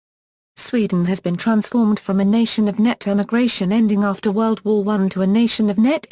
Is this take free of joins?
yes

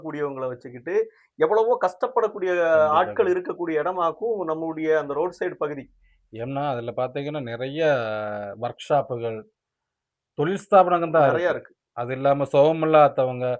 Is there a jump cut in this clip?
no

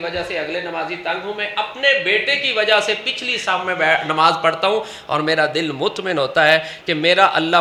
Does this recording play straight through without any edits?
yes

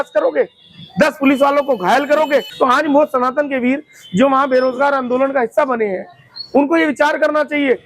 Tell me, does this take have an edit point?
yes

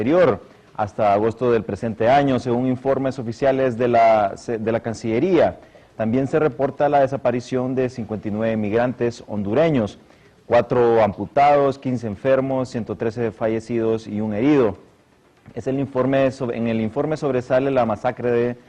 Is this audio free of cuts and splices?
no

